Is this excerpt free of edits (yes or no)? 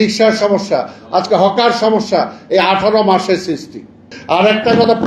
no